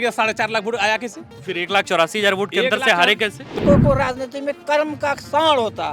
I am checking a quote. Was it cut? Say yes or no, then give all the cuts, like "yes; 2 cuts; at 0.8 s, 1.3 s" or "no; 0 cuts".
yes; 1 cut; at 3.6 s